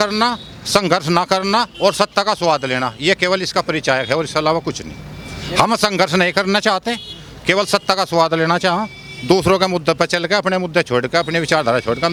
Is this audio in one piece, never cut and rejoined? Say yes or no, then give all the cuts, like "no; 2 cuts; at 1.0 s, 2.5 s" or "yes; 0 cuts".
yes; 0 cuts